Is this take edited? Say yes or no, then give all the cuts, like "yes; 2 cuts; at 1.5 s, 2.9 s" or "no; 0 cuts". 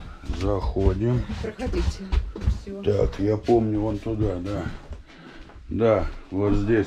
no; 0 cuts